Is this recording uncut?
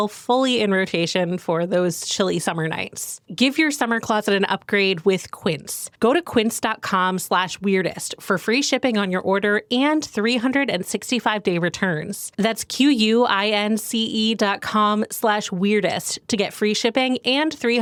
yes; 0 cuts

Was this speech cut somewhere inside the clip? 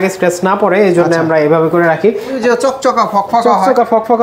yes; 1 cut; at 2.4 s

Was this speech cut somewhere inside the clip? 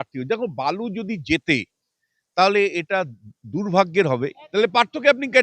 yes; 1 cut; at 4.4 s

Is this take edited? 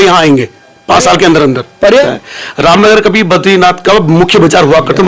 yes; 1 cut; at 2.1 s

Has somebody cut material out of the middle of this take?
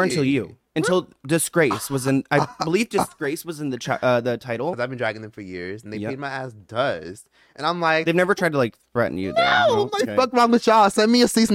yes; 1 cut; at 4.8 s

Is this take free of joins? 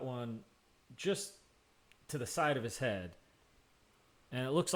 yes; 0 cuts

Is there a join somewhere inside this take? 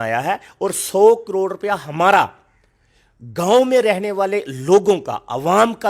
no; 0 cuts

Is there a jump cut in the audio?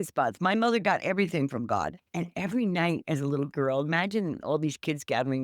yes; 1 cut; at 2.0 s

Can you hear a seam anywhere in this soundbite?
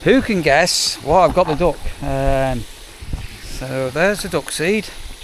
no; 0 cuts

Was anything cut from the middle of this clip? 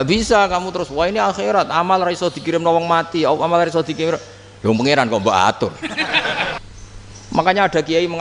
yes; 1 cut; at 6.6 s

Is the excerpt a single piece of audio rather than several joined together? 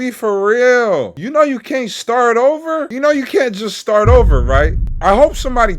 no; 3 cuts; at 1.2 s, 2.9 s, 4.9 s

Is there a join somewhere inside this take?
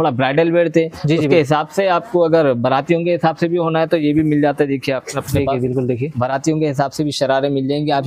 no; 0 cuts

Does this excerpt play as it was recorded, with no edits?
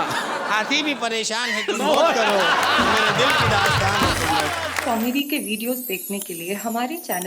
no; 1 cut; at 4.8 s

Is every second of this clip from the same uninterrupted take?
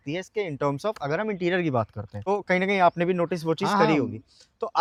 yes; 0 cuts

